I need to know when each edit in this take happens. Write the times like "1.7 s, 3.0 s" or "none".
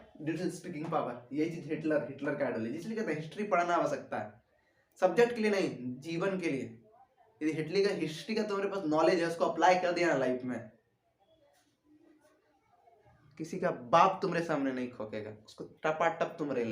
none